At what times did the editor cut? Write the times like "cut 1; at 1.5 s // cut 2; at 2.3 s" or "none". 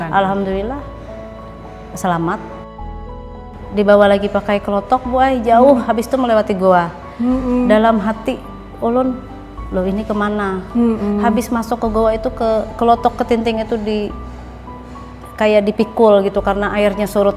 cut 1; at 3.1 s